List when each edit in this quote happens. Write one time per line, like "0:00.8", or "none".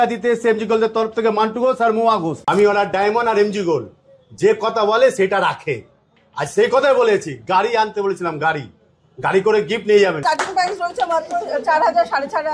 0:02.3
0:10.2